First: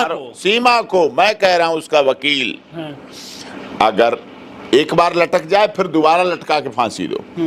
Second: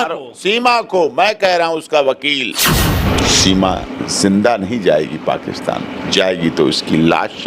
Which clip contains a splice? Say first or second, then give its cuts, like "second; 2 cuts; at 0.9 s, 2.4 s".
second; 1 cut; at 3.1 s